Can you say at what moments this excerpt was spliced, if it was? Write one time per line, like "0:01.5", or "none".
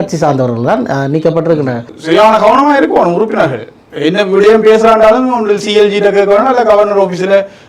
0:01.9